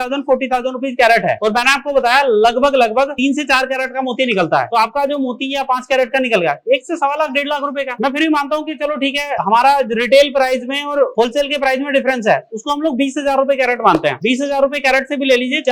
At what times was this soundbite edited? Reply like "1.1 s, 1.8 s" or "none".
none